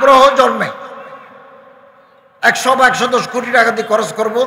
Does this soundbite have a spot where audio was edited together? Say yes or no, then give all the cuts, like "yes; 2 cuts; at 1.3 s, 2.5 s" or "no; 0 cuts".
no; 0 cuts